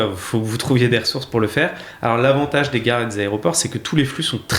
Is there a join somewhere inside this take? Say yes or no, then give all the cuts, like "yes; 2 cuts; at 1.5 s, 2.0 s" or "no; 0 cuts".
no; 0 cuts